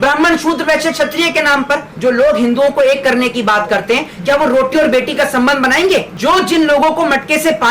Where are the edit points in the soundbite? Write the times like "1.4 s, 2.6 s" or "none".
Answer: 1.9 s